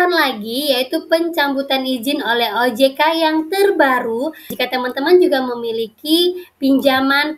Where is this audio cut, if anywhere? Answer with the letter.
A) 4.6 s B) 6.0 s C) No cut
A